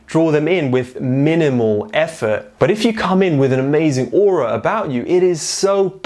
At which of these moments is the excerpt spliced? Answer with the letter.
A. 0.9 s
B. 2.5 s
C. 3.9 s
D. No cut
B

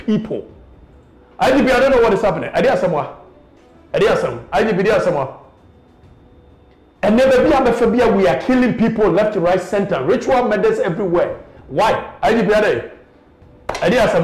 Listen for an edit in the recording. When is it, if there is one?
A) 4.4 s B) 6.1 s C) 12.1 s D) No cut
D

